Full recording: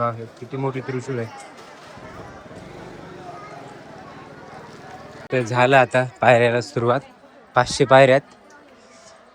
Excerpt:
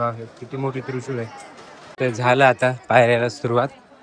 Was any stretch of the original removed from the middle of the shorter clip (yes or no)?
yes